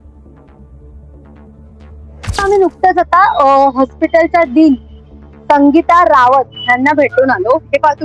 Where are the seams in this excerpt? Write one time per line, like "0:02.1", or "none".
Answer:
0:02.3